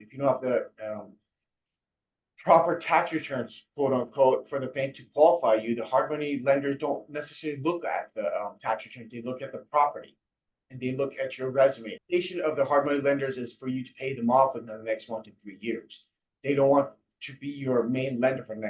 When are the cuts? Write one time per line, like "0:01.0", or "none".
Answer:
0:11.9